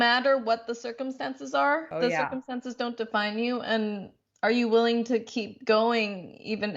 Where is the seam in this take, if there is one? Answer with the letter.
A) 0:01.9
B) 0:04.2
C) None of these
A